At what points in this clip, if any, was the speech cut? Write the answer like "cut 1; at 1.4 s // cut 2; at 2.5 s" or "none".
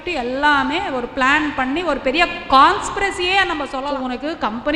cut 1; at 3.8 s